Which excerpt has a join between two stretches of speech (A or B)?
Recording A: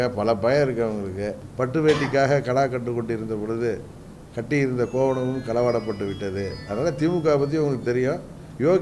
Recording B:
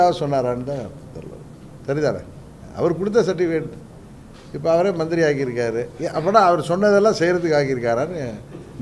A